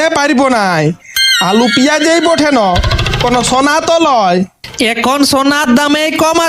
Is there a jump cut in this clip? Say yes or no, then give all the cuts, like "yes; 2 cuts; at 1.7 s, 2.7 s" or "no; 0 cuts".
no; 0 cuts